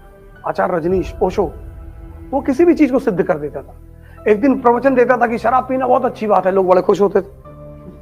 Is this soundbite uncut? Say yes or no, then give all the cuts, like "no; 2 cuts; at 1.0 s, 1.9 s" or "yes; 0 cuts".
yes; 0 cuts